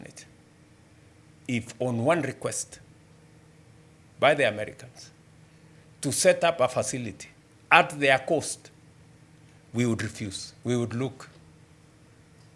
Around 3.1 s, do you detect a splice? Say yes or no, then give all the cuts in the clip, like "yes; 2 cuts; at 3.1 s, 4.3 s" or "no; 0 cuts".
no; 1 cut; at 10.5 s